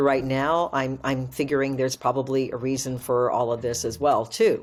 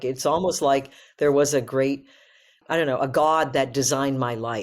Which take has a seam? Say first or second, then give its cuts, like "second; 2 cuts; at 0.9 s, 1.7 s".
second; 1 cut; at 2.6 s